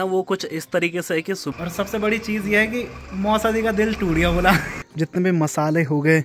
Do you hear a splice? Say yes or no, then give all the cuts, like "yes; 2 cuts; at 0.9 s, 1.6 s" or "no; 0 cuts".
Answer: yes; 2 cuts; at 1.5 s, 4.8 s